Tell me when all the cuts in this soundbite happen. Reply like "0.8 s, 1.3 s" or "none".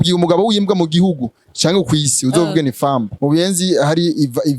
3.1 s